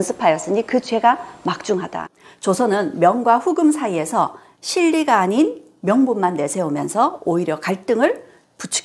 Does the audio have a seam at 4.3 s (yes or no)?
no